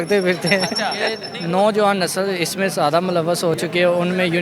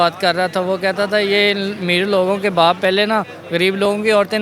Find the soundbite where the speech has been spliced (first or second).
first